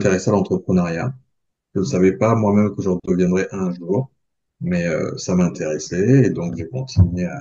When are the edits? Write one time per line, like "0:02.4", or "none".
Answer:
none